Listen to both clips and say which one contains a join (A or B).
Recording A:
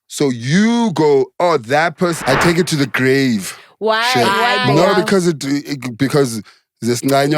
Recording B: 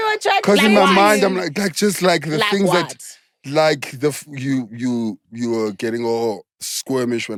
A